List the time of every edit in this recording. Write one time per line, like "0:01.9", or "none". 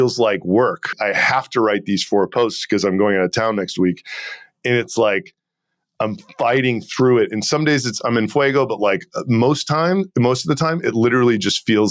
0:00.9

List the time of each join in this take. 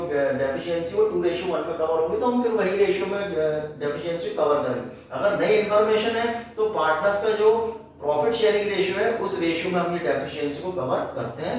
none

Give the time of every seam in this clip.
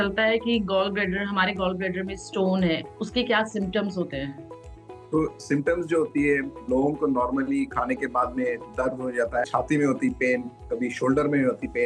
0:09.4

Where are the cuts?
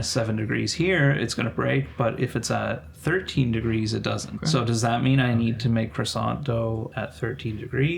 0:04.4
0:06.9

